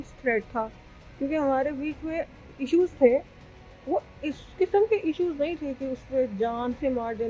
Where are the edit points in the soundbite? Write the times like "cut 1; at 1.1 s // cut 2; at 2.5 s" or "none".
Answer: none